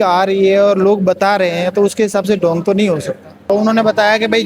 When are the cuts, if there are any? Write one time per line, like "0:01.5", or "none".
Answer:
0:03.3